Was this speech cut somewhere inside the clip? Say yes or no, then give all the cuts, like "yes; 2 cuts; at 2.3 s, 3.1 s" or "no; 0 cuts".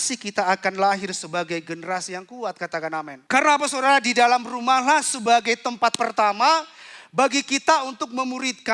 yes; 1 cut; at 3.2 s